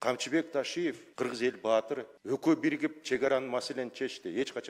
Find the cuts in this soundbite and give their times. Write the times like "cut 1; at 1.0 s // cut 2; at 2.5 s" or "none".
cut 1; at 1.0 s // cut 2; at 2.1 s

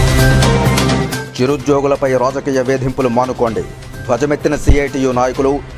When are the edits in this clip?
cut 1; at 1.0 s

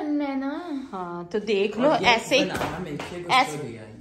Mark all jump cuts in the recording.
none

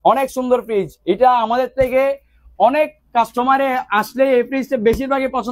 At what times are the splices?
none

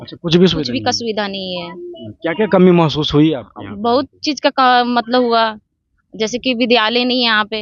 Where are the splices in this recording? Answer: none

